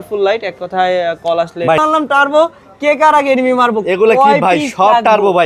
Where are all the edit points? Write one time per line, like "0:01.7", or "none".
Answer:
0:01.8